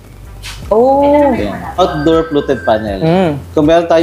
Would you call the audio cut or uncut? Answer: cut